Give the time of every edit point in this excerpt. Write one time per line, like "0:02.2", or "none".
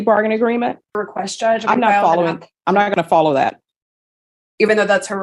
0:01.0